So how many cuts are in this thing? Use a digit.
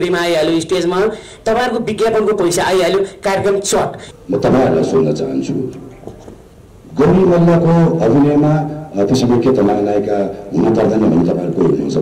1